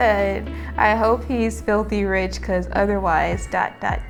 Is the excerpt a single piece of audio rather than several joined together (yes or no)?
yes